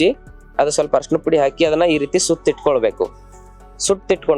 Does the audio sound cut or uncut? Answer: uncut